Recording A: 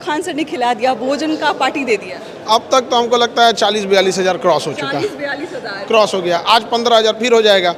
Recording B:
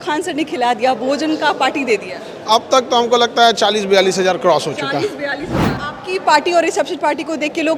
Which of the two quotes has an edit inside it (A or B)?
B